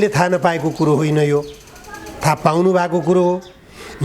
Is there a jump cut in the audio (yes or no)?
no